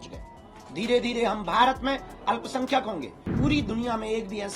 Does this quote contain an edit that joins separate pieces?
yes; 1 cut; at 3.3 s

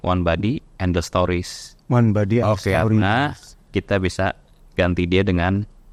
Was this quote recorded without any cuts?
yes; 0 cuts

